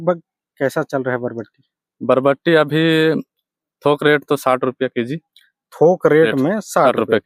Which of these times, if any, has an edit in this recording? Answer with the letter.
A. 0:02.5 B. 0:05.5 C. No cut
C